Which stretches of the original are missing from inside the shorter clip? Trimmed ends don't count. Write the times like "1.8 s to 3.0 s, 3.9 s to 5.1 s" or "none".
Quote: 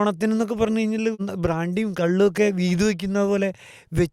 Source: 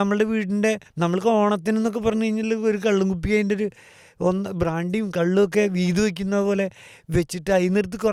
2.6 s to 4.3 s